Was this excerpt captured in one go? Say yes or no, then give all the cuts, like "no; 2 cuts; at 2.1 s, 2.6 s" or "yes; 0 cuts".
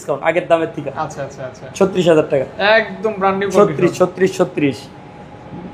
yes; 0 cuts